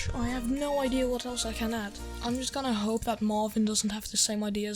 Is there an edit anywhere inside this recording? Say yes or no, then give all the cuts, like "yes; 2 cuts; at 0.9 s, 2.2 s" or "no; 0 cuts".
no; 0 cuts